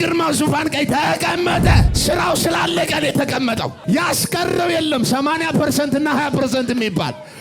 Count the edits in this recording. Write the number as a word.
two